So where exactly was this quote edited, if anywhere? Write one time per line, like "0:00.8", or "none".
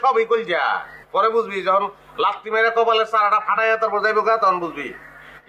0:00.9